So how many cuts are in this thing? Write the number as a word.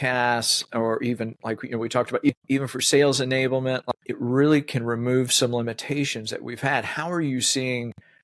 two